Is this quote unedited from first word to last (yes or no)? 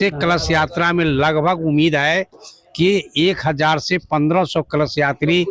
yes